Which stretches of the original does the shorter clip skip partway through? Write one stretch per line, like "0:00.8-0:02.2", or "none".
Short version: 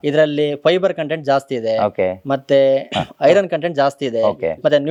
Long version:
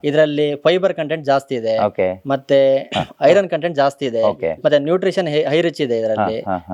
none